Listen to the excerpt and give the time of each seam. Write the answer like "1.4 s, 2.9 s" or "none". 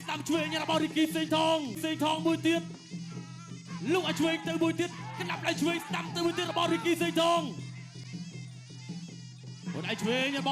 1.8 s